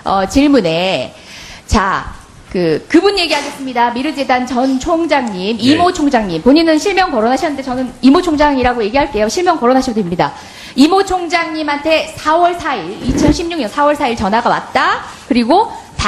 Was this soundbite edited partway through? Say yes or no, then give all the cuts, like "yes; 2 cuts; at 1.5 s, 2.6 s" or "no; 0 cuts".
no; 0 cuts